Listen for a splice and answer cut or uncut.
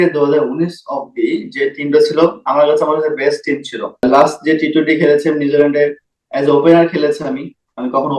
cut